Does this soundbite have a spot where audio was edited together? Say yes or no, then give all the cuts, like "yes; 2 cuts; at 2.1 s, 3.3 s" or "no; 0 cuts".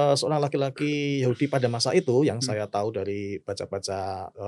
no; 0 cuts